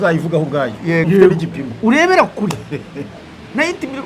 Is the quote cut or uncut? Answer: cut